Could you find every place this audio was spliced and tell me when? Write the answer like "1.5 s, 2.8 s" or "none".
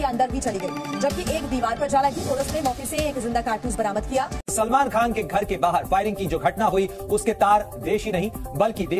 4.4 s

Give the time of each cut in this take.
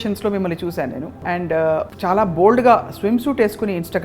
1.1 s, 1.9 s

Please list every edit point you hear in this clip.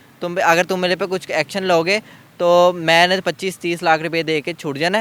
none

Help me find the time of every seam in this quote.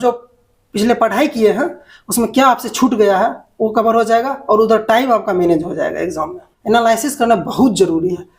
6.5 s

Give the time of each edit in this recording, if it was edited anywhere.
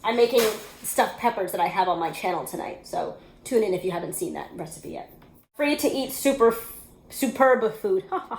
5.5 s

